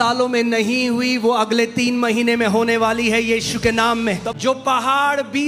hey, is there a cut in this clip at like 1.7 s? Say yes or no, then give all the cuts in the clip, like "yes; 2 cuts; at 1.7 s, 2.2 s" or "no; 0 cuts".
no; 1 cut; at 4.3 s